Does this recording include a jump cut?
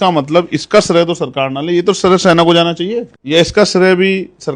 yes; 1 cut; at 3.1 s

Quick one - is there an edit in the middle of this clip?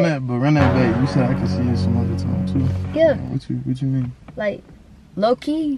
no; 0 cuts

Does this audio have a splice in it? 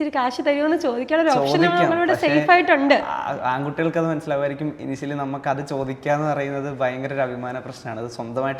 no; 0 cuts

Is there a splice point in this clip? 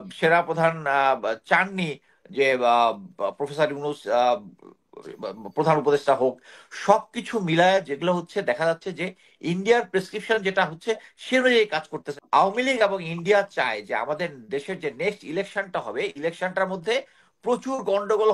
yes; 1 cut; at 12.0 s

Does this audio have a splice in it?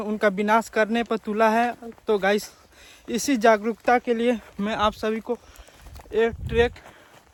no; 0 cuts

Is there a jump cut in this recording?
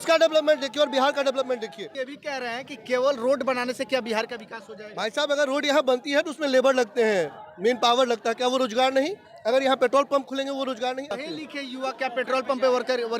yes; 2 cuts; at 2.0 s, 11.2 s

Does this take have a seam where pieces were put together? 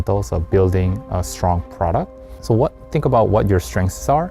no; 0 cuts

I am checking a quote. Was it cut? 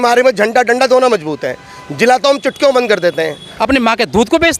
yes; 1 cut; at 3.4 s

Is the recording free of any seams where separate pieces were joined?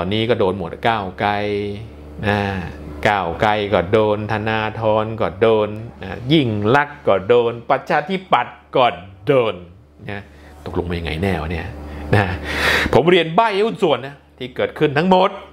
yes; 0 cuts

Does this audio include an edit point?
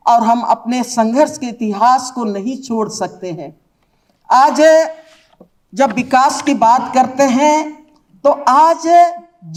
no; 0 cuts

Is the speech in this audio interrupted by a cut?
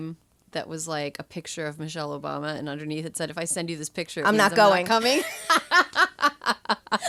no; 0 cuts

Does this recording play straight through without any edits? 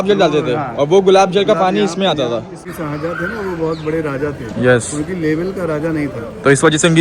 no; 1 cut; at 2.7 s

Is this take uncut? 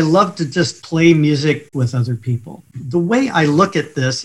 no; 1 cut; at 1.6 s

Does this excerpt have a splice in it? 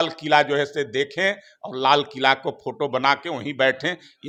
no; 0 cuts

